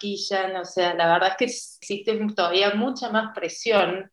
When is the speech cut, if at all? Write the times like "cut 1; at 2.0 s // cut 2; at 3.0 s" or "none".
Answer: cut 1; at 1.7 s